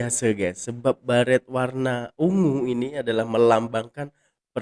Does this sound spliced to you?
no; 0 cuts

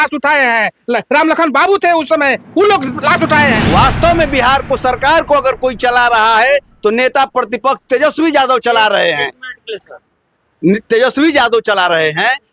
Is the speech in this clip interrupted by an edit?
yes; 1 cut; at 3.6 s

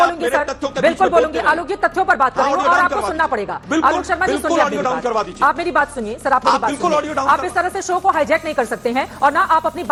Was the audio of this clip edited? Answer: no; 0 cuts

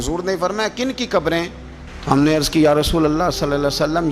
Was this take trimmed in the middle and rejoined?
no; 0 cuts

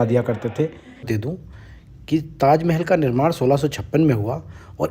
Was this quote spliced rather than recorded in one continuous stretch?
yes; 1 cut; at 1.1 s

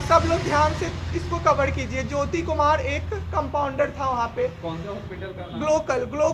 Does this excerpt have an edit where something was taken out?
no; 0 cuts

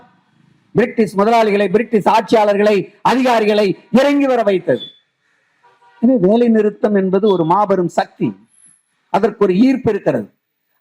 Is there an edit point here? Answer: no; 0 cuts

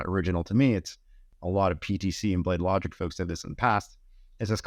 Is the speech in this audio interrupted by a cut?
no; 0 cuts

